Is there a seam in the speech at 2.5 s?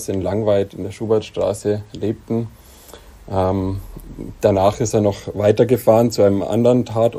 no; 0 cuts

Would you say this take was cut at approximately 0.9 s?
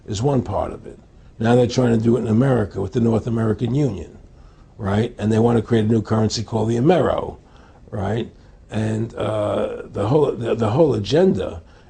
no; 1 cut; at 4.0 s

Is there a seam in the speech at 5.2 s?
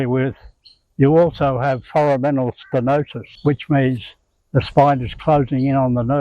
no; 1 cut; at 3.2 s

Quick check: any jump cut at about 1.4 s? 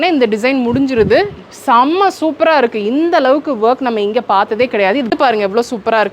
no; 1 cut; at 5.1 s

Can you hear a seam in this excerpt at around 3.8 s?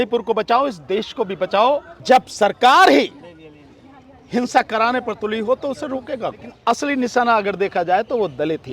no; 2 cuts; at 1.9 s, 6.5 s

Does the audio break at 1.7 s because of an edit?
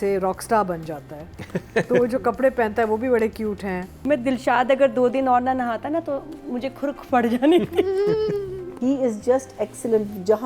no; 2 cuts; at 4.0 s, 8.7 s

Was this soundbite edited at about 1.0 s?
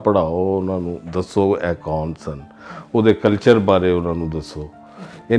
yes; 1 cut; at 1.0 s

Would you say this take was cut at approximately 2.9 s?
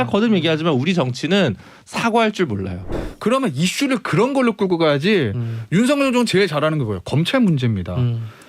yes; 1 cut; at 2.9 s

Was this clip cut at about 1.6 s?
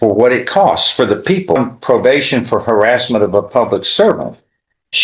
yes; 1 cut; at 1.6 s

